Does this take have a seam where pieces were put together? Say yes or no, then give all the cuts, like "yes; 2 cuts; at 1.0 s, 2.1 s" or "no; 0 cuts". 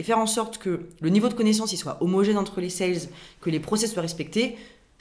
no; 0 cuts